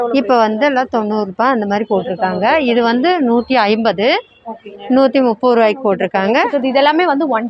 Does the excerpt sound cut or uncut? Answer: cut